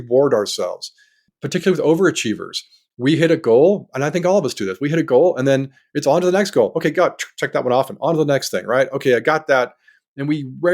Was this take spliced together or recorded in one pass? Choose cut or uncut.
cut